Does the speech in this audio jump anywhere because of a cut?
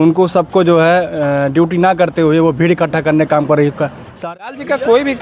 yes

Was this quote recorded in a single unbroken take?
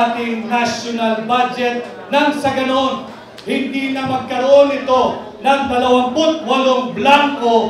yes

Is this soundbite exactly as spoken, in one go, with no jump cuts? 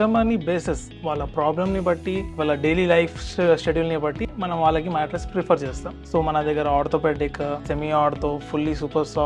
no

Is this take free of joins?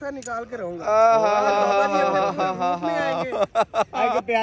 yes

